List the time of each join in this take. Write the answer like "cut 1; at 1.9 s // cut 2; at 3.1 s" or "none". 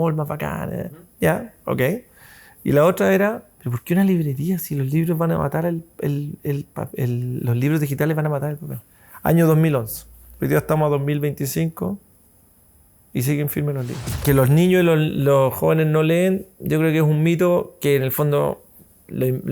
cut 1; at 14.2 s

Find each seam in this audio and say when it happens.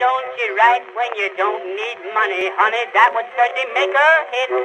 cut 1; at 2.4 s

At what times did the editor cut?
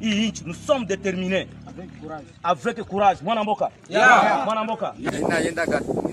cut 1; at 5.0 s

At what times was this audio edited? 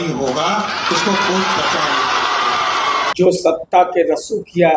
cut 1; at 3.1 s

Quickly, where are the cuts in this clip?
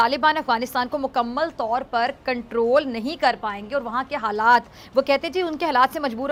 none

